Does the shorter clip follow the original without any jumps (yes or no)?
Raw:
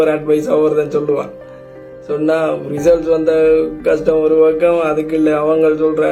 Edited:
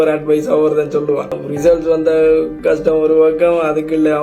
no